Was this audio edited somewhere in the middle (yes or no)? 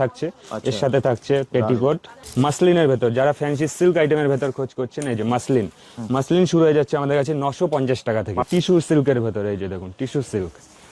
yes